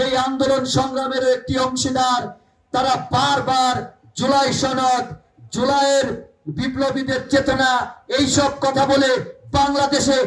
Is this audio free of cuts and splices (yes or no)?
yes